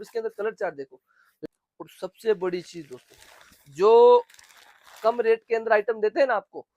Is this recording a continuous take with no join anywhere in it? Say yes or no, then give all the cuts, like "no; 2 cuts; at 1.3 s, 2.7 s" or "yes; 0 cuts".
no; 1 cut; at 1.4 s